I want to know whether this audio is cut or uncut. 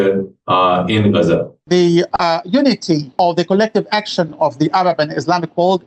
cut